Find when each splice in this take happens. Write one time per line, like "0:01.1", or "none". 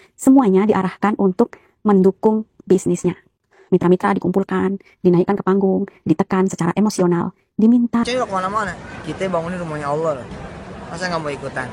0:08.0